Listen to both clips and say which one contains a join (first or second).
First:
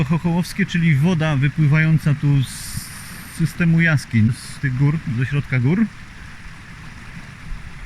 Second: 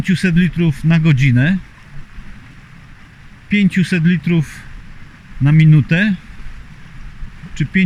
first